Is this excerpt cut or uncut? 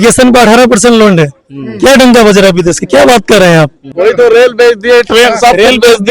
cut